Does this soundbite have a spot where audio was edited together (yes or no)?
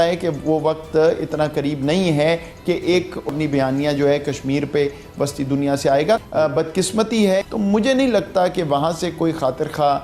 yes